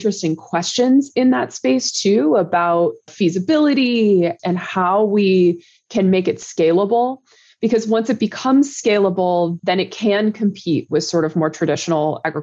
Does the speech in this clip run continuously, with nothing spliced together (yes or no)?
yes